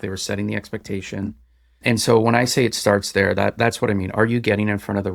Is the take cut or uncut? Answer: uncut